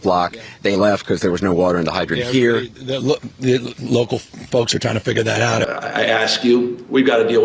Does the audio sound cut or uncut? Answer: cut